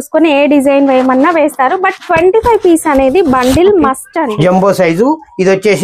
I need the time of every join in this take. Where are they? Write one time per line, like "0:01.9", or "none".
0:04.3